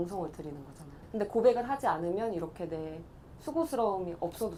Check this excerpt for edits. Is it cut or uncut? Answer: uncut